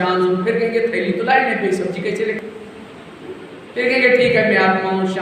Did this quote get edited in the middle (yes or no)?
yes